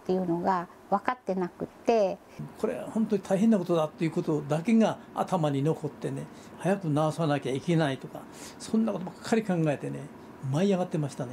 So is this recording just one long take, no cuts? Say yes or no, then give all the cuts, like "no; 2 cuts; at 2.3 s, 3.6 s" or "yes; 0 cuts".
no; 2 cuts; at 2.5 s, 6.5 s